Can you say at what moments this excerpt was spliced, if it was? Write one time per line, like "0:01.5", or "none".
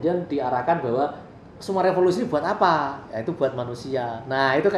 none